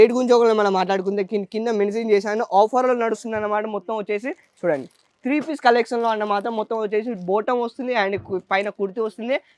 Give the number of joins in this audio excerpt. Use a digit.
0